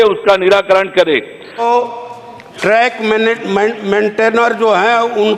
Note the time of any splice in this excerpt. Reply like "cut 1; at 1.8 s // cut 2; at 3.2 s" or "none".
cut 1; at 1.6 s